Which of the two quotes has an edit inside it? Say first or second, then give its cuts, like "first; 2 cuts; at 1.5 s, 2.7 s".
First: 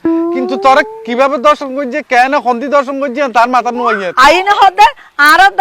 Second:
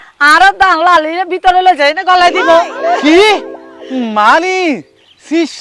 first; 1 cut; at 4.0 s